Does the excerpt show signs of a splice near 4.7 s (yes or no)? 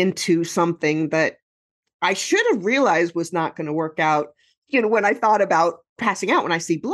yes